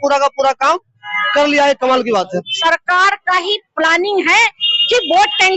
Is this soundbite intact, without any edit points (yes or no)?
no